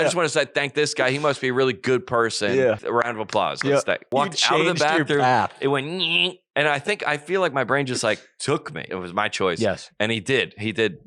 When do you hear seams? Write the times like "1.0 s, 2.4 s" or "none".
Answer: 2.8 s, 4.1 s, 8.9 s